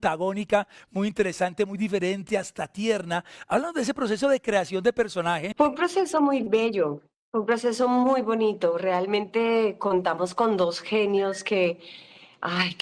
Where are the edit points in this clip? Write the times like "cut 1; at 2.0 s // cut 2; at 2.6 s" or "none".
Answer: cut 1; at 5.5 s